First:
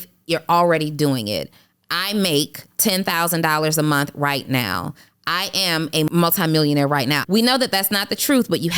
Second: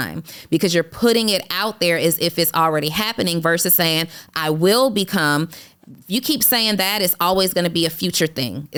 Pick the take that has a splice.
first; 2 cuts; at 6.1 s, 7.2 s

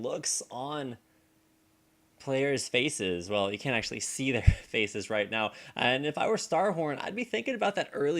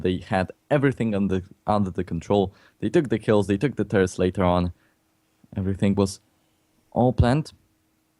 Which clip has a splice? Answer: first; 1 cut; at 1.9 s

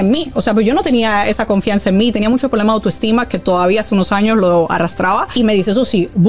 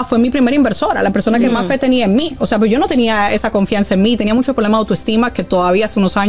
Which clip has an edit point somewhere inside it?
first; 1 cut; at 5.3 s

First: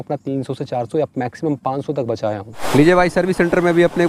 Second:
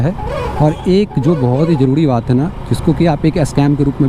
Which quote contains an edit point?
first; 1 cut; at 2.6 s

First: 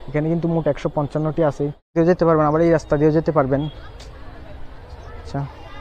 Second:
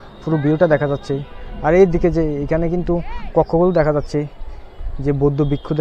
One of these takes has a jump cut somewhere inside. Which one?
first; 1 cut; at 1.9 s

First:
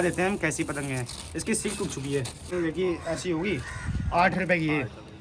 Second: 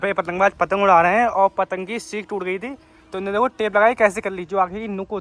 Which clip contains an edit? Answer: first; 1 cut; at 2.5 s

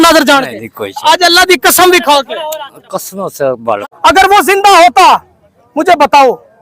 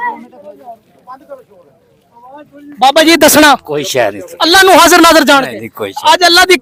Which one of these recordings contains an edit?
first; 1 cut; at 3.8 s

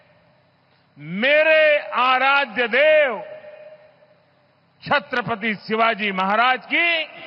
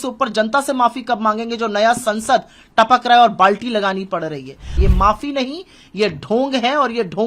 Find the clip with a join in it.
second; 1 cut; at 4.7 s

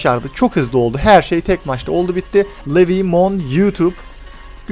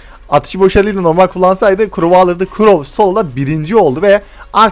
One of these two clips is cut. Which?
first; 1 cut; at 2.6 s

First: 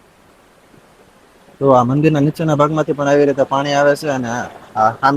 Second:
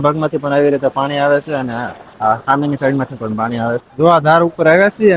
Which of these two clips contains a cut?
second; 1 cut; at 3.9 s

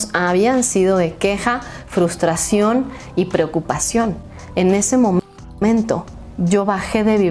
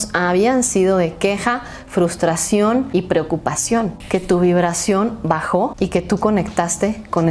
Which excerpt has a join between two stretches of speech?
second; 3 cuts; at 2.9 s, 4.0 s, 5.7 s

